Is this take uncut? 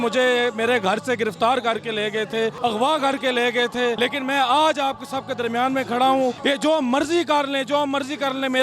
no; 3 cuts; at 2.6 s, 4.0 s, 6.4 s

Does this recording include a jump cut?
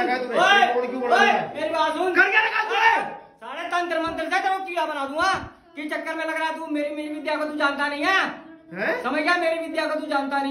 no; 0 cuts

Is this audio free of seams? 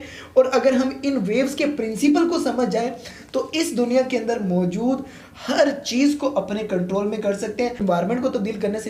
no; 1 cut; at 7.8 s

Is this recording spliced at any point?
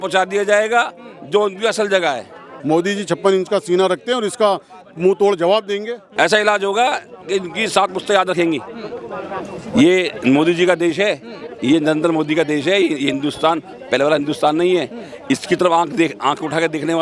yes; 2 cuts; at 2.5 s, 6.0 s

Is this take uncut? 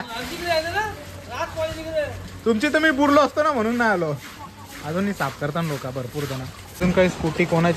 no; 1 cut; at 6.7 s

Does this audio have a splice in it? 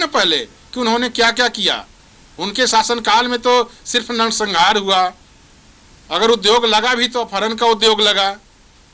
no; 0 cuts

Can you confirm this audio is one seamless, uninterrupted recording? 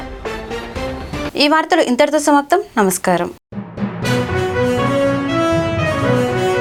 yes; 0 cuts

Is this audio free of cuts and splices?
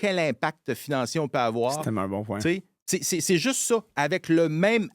yes; 0 cuts

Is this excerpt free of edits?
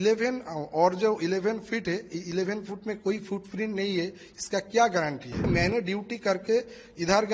no; 1 cut; at 5.5 s

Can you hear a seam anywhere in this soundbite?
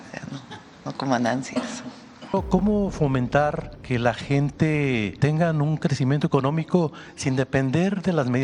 yes; 3 cuts; at 2.3 s, 3.7 s, 5.1 s

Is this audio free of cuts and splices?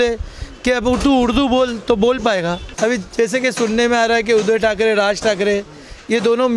no; 1 cut; at 2.7 s

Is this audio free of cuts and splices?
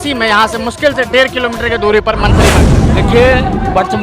no; 1 cut; at 2.6 s

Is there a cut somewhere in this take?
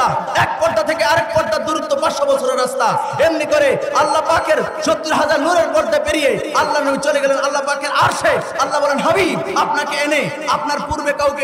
no; 0 cuts

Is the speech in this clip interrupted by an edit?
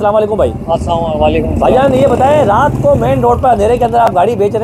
no; 0 cuts

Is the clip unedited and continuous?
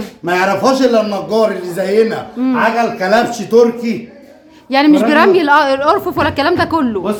yes; 0 cuts

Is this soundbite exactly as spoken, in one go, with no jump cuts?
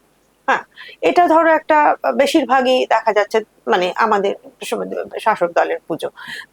yes; 0 cuts

